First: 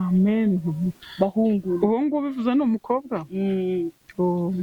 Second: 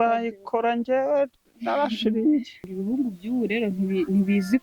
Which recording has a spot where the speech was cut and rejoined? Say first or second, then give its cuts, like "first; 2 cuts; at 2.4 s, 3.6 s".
second; 1 cut; at 2.7 s